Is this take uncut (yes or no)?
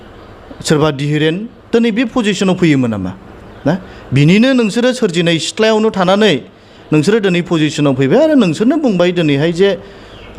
yes